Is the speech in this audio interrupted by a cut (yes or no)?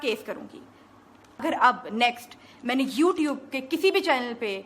yes